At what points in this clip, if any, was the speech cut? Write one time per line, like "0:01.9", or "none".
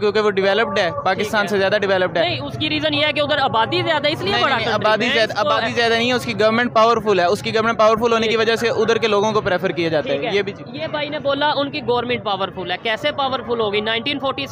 none